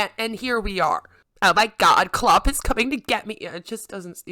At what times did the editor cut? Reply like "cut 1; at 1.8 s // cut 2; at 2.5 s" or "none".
cut 1; at 1.1 s